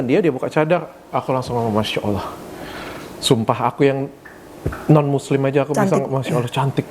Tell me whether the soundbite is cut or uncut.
uncut